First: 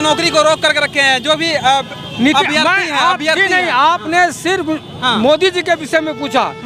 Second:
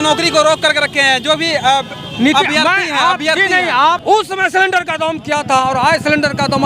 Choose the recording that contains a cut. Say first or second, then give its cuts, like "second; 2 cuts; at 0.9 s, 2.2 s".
second; 1 cut; at 4.0 s